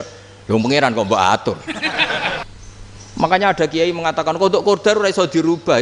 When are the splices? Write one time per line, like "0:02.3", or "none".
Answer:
0:02.5